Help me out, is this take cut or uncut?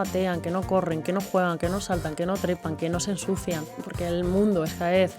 cut